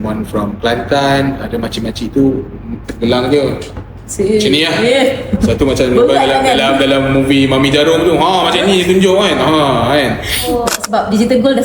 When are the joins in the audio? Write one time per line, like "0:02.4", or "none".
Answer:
0:10.5